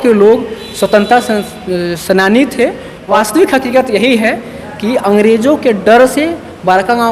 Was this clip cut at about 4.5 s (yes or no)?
no